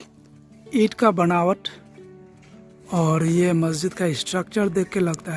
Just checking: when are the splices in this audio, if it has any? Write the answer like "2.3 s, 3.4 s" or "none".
none